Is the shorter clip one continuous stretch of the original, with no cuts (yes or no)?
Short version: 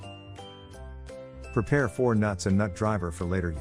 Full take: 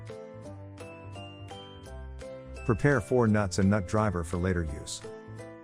yes